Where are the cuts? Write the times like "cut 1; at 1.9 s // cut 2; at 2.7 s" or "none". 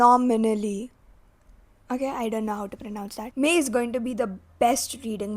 cut 1; at 3.2 s